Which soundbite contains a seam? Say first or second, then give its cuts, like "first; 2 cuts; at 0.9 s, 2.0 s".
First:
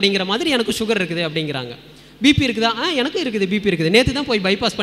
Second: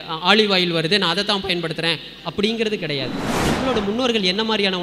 second; 1 cut; at 3.5 s